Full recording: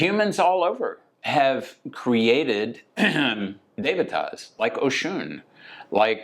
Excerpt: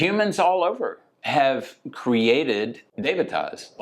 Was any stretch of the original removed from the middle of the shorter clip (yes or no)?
yes